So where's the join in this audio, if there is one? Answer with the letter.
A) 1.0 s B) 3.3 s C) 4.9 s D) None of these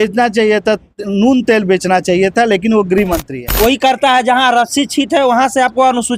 B